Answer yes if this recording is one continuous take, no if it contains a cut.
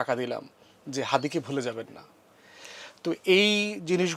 yes